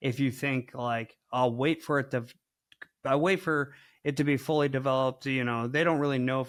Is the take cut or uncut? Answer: uncut